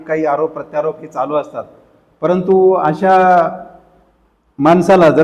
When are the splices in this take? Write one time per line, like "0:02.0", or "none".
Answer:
none